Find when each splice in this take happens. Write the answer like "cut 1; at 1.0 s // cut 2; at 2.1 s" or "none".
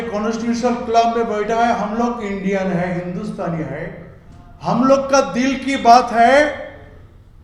none